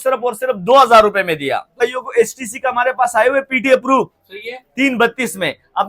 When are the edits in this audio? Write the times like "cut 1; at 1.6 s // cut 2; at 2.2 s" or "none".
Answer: cut 1; at 1.8 s

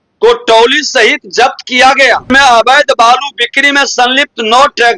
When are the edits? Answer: cut 1; at 2.3 s

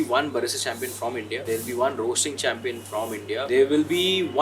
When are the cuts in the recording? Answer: cut 1; at 1.4 s // cut 2; at 3.5 s

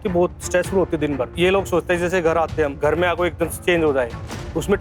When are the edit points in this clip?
cut 1; at 1.3 s // cut 2; at 2.8 s // cut 3; at 3.6 s

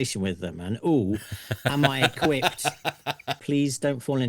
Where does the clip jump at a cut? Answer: cut 1; at 3.3 s

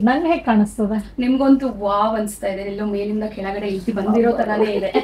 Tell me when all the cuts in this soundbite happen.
none

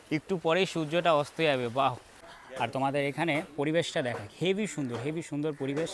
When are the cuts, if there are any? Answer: cut 1; at 2.3 s

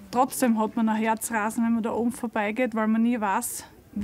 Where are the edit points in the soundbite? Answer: none

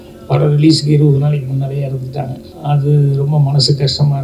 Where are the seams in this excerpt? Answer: cut 1; at 2.5 s

